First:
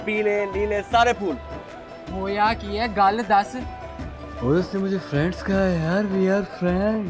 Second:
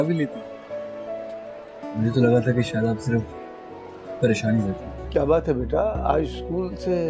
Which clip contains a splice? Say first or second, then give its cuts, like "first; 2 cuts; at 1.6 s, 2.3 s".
second; 1 cut; at 4.9 s